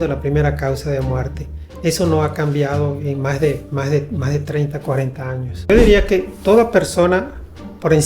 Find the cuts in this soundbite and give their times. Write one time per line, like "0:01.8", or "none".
0:05.6